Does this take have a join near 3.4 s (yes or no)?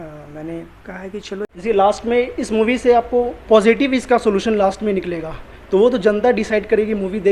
no